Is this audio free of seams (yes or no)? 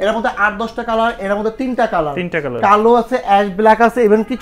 yes